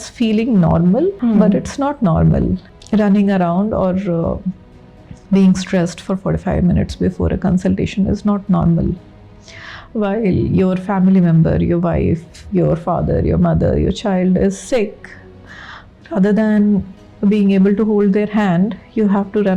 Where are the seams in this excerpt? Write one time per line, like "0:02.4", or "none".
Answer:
0:01.2
0:02.7